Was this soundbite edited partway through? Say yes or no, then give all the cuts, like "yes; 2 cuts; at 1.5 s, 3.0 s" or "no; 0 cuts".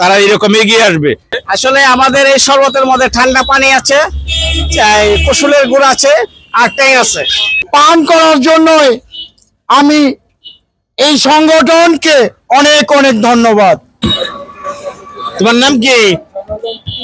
yes; 3 cuts; at 1.3 s, 7.6 s, 14.0 s